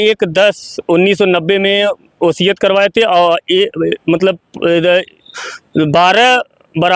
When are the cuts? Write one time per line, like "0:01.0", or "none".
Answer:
none